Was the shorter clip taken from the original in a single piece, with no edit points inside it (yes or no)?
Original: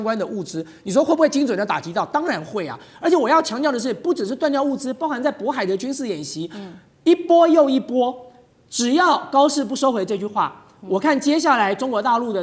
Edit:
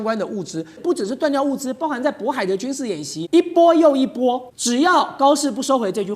no